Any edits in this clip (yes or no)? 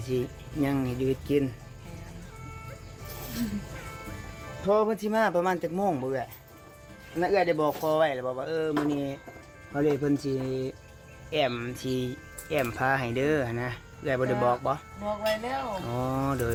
no